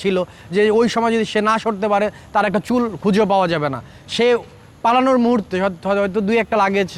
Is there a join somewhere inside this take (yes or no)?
no